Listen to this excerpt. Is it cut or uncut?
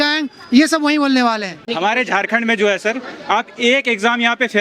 cut